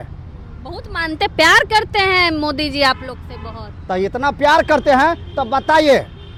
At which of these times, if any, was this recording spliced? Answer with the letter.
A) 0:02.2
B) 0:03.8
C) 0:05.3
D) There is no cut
D